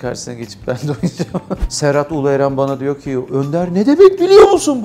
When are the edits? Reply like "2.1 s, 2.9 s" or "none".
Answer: 1.7 s